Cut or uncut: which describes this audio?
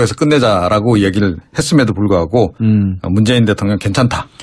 uncut